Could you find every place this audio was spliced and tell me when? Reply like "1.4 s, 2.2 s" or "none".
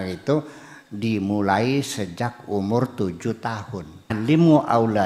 4.1 s